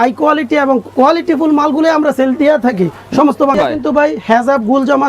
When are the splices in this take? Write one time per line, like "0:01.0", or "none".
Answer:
0:03.5